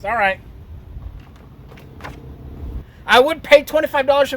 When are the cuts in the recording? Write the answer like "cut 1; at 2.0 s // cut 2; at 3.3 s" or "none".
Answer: cut 1; at 2.9 s